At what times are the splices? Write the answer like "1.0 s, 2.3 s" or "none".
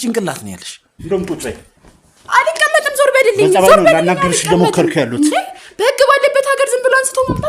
1.0 s